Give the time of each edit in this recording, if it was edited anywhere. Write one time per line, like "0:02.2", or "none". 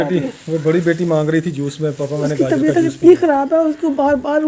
none

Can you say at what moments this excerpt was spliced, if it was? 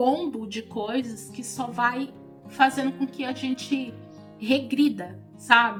none

